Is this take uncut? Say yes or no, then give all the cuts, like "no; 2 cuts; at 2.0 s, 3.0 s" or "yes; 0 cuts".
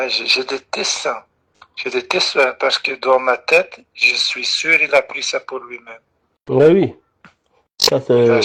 yes; 0 cuts